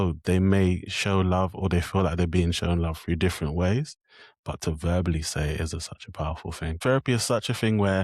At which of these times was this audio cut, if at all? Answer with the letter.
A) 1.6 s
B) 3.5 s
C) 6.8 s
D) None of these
C